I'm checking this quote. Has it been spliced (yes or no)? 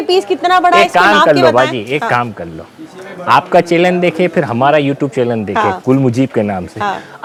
no